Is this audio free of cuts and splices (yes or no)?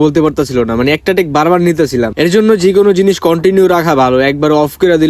yes